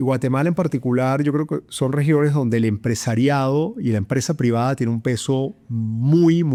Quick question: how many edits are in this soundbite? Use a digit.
0